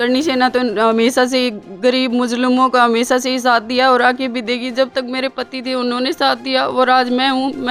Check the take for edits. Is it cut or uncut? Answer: uncut